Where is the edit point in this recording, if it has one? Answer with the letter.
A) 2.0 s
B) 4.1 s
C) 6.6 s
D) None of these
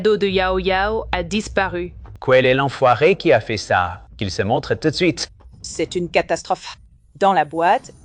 A